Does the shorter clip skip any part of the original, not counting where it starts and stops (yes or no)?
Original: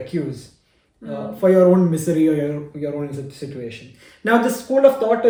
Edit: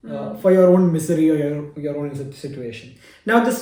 no